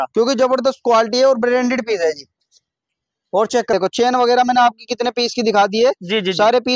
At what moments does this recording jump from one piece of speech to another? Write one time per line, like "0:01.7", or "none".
0:03.7

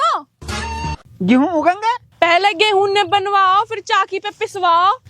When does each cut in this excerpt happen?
0:02.1

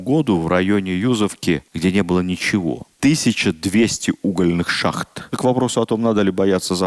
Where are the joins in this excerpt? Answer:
0:01.7
0:02.9
0:05.2

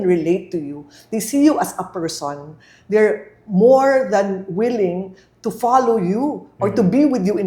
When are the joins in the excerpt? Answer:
none

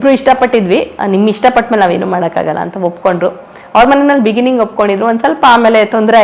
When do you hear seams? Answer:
0:00.9

